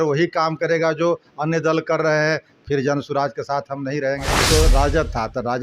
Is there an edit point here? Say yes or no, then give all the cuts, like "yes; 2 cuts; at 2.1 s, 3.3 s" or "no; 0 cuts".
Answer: yes; 1 cut; at 4.4 s